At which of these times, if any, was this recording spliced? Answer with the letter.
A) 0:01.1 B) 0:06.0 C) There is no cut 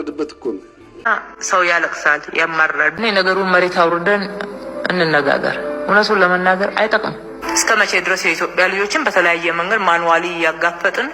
A